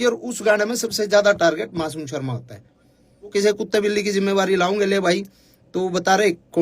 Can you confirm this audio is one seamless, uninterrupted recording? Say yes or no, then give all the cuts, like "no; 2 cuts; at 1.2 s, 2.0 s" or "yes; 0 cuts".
no; 1 cut; at 3.3 s